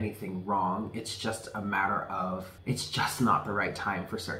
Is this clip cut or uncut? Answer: cut